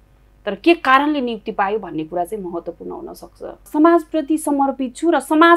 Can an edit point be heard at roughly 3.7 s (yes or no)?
yes